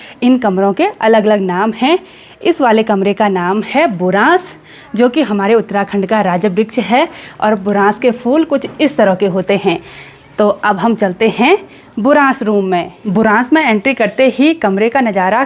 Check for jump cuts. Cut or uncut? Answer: uncut